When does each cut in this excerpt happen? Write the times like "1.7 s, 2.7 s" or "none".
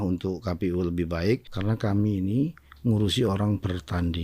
1.5 s